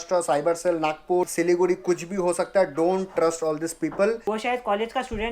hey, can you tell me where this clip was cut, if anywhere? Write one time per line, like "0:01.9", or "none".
0:01.3
0:04.2